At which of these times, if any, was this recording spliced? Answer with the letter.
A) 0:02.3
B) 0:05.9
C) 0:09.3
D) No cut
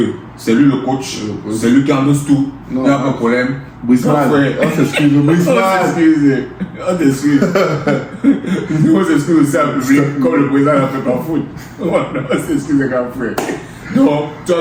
D